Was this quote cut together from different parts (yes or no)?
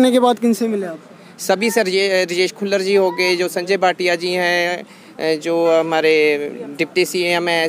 no